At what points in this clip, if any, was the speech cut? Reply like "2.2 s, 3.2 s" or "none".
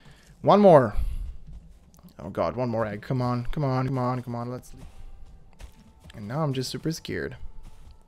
4.6 s

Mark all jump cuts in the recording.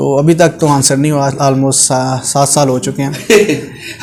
none

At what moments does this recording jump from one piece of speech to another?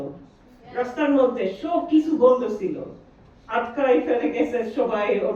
none

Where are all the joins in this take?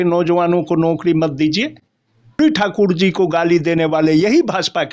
2.4 s

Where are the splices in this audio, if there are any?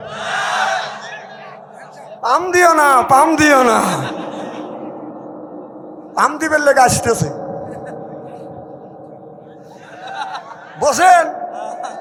none

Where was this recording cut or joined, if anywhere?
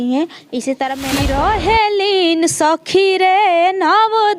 1.0 s

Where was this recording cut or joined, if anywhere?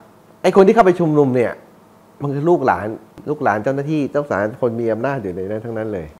3.1 s

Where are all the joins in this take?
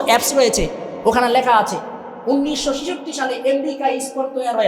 none

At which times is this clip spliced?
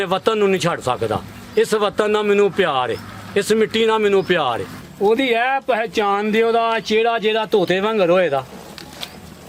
4.9 s

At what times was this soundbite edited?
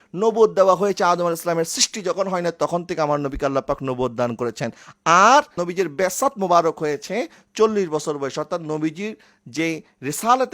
none

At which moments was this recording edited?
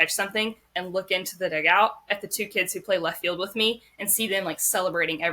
none

